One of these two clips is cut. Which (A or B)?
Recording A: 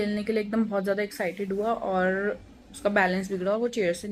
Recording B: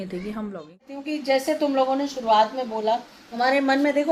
B